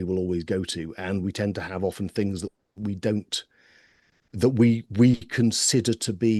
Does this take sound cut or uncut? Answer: uncut